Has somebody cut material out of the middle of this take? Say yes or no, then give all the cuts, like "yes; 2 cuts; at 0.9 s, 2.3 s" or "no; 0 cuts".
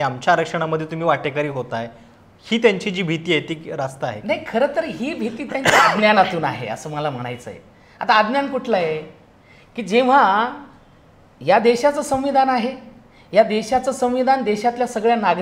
no; 0 cuts